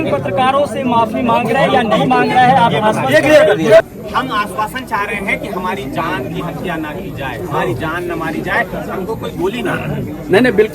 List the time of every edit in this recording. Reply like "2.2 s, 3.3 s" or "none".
3.8 s